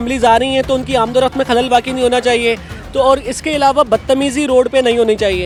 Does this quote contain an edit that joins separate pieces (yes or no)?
no